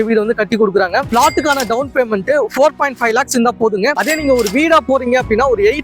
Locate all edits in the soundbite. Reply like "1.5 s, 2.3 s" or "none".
1.1 s